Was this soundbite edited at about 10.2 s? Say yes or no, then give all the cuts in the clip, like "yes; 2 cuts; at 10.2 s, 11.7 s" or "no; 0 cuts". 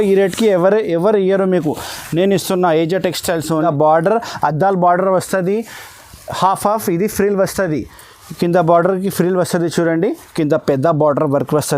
yes; 2 cuts; at 3.6 s, 10.2 s